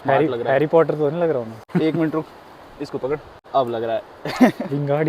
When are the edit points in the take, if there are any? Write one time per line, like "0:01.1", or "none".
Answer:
0:01.6
0:03.3

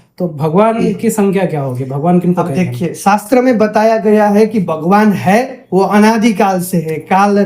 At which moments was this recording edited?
none

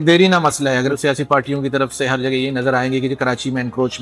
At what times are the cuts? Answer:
0:00.9

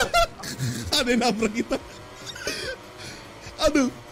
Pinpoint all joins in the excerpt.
none

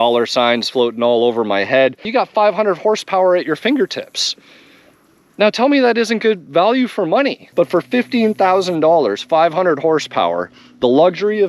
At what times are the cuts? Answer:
0:02.0
0:07.4

